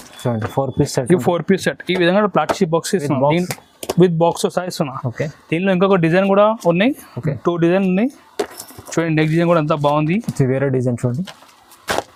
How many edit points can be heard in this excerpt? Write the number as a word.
zero